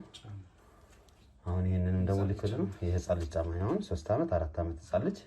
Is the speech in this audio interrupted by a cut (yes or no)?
no